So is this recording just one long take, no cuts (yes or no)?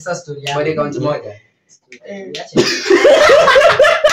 yes